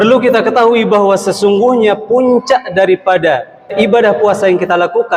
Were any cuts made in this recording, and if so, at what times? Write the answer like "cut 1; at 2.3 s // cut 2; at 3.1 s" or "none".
cut 1; at 3.7 s